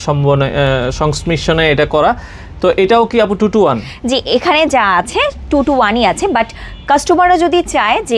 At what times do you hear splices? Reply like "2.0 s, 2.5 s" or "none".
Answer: none